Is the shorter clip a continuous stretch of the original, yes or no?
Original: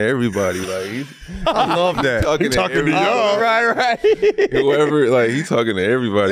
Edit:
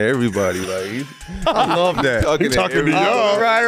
yes